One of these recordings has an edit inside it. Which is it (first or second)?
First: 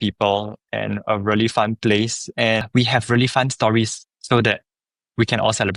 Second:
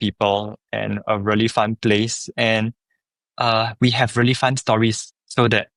first